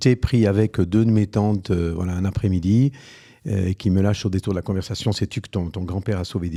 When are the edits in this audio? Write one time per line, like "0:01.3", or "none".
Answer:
none

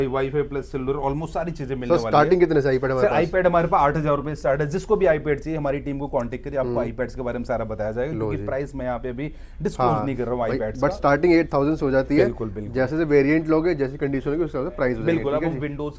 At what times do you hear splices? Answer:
none

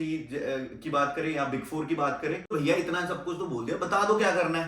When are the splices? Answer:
0:02.5

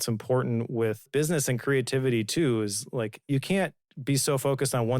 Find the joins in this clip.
0:01.0
0:03.3

